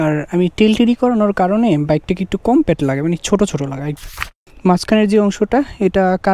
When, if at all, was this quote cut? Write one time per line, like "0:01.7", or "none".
0:04.0